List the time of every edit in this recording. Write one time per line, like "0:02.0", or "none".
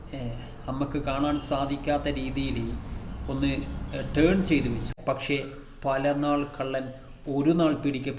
0:04.9